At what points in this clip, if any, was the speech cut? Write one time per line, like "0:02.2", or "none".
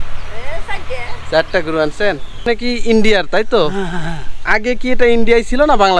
0:02.4